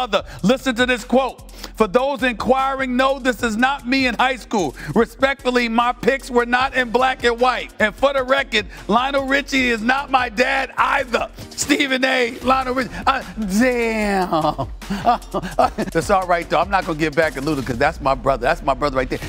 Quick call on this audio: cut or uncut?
cut